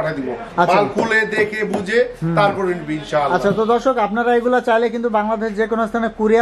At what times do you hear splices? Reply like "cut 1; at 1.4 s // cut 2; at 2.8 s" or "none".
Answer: none